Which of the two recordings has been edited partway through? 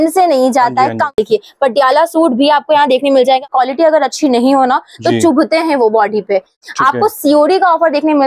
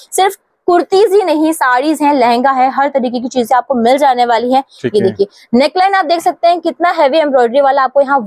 first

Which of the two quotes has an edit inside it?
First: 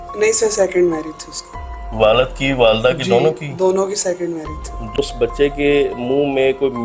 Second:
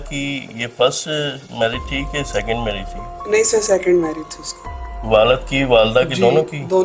first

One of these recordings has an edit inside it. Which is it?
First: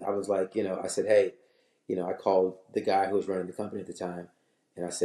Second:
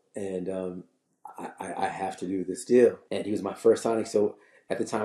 second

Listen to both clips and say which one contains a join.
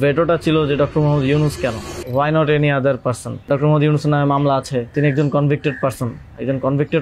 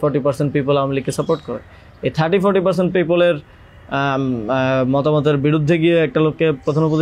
first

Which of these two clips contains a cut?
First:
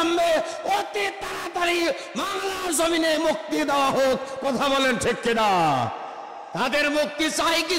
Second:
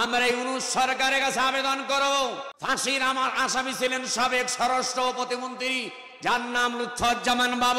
second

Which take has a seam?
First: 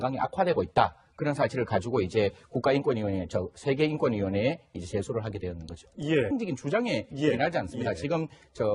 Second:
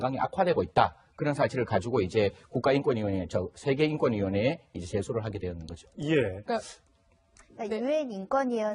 second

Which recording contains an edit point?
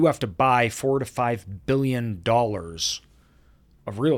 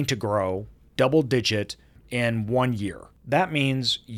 second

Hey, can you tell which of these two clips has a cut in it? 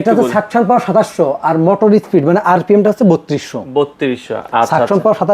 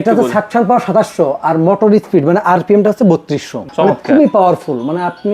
second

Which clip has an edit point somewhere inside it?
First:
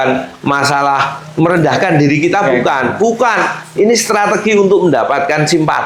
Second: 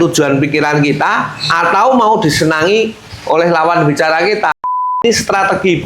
second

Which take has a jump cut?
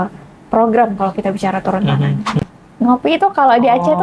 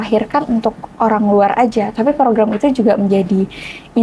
first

